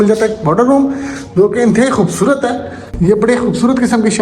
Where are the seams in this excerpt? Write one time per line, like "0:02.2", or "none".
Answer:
0:02.8